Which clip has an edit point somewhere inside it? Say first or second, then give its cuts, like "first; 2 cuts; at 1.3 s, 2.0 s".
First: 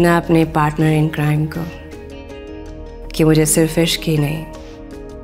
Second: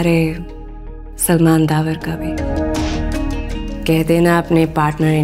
second; 1 cut; at 2.1 s